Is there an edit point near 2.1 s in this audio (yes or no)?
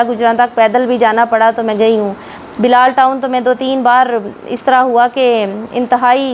no